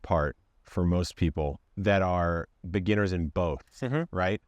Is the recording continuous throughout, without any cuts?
no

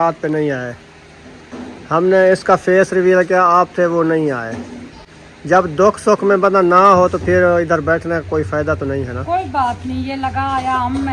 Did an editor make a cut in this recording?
no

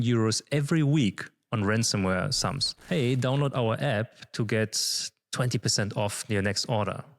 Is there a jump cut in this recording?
yes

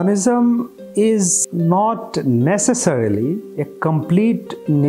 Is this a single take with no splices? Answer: no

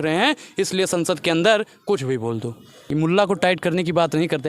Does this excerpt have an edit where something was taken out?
yes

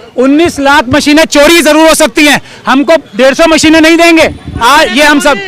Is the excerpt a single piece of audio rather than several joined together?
no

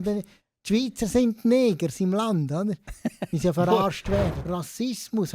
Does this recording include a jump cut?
yes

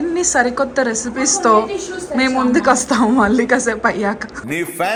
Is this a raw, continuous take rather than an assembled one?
yes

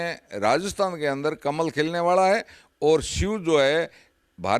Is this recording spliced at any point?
no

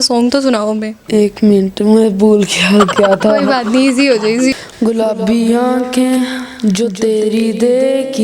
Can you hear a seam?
yes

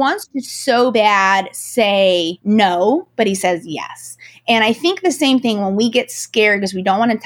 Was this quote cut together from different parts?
yes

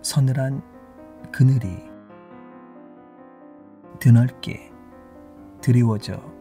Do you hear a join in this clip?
yes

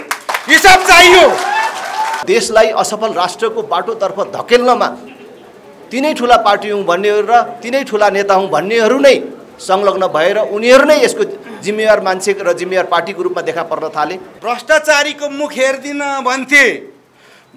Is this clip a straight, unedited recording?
no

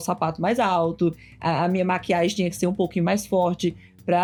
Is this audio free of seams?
yes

